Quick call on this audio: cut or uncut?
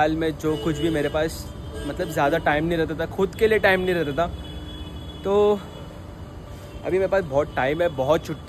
uncut